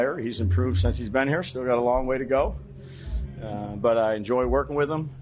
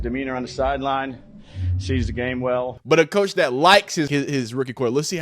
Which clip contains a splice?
second; 2 cuts; at 2.7 s, 4.1 s

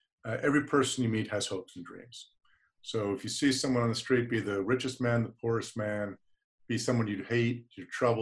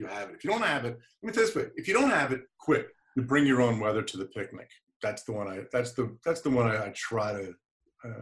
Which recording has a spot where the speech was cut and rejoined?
second; 1 cut; at 3.0 s

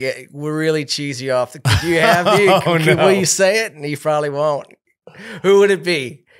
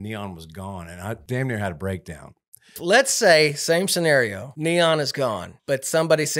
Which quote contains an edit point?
second; 4 cuts; at 1.2 s, 2.8 s, 4.5 s, 5.5 s

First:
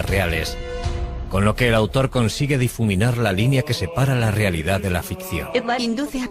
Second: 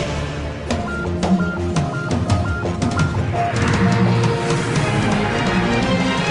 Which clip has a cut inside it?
first; 1 cut; at 2.3 s

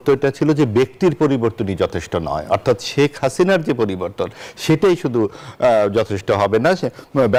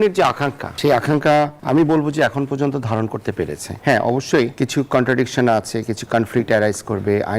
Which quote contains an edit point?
second; 4 cuts; at 0.8 s, 1.6 s, 3.7 s, 4.5 s

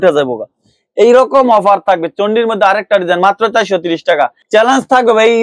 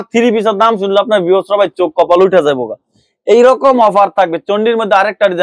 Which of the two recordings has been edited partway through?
first; 1 cut; at 4.4 s

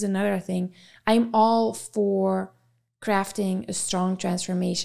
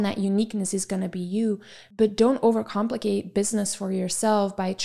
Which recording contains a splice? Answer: second; 1 cut; at 1.8 s

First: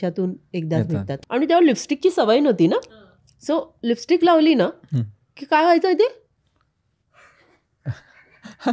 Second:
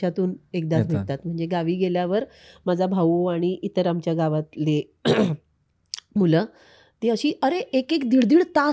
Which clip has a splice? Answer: first; 1 cut; at 1.1 s

